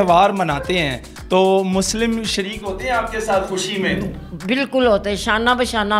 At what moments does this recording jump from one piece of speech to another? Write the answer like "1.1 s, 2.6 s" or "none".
none